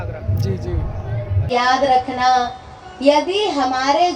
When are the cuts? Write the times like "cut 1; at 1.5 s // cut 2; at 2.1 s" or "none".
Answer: cut 1; at 1.5 s

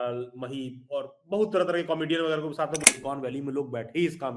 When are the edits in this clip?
cut 1; at 2.8 s

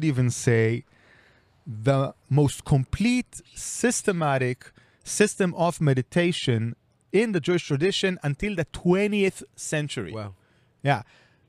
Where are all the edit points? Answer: cut 1; at 2.2 s // cut 2; at 7.0 s

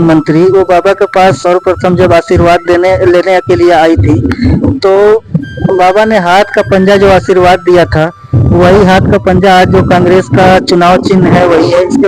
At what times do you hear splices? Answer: none

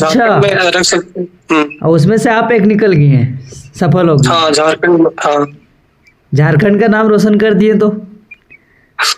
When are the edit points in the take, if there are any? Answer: none

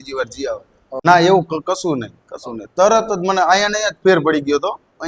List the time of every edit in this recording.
cut 1; at 1.0 s

